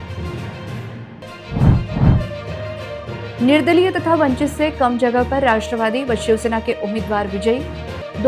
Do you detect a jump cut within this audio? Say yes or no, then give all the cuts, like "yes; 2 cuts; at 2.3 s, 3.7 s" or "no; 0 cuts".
yes; 1 cut; at 1.1 s